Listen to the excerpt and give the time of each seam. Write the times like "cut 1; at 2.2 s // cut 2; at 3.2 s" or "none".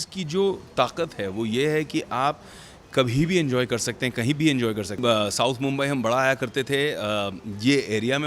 cut 1; at 5.0 s